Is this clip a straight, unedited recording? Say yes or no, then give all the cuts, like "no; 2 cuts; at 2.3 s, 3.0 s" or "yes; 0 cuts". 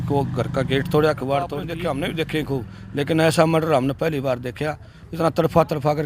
no; 1 cut; at 1.7 s